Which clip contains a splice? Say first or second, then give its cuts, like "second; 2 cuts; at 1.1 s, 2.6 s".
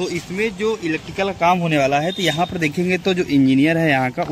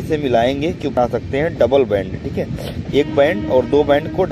second; 1 cut; at 0.9 s